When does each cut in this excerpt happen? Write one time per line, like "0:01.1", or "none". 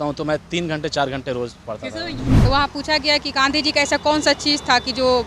0:02.2